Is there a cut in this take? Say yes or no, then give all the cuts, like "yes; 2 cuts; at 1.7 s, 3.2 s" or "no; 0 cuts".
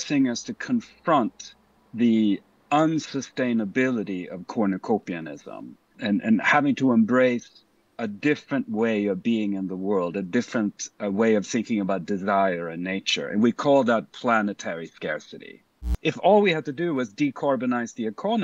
yes; 2 cuts; at 6.0 s, 15.9 s